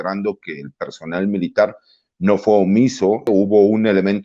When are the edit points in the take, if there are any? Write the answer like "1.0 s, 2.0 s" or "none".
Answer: 3.3 s